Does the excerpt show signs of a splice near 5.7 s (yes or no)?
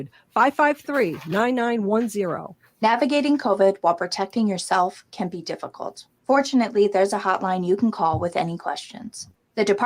no